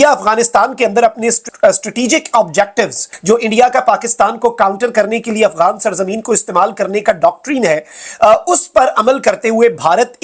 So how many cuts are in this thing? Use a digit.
2